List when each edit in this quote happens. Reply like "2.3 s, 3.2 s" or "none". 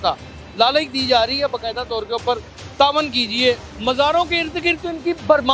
3.7 s